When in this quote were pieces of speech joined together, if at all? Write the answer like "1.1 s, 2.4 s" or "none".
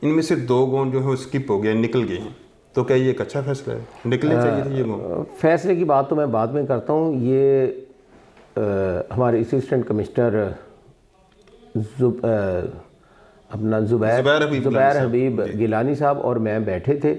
none